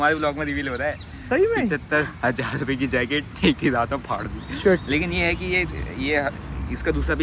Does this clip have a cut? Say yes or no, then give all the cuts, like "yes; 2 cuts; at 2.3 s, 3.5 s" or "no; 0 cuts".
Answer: no; 0 cuts